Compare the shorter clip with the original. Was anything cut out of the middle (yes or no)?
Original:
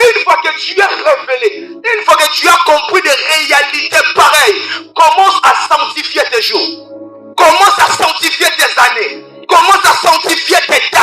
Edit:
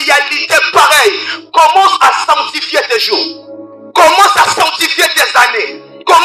no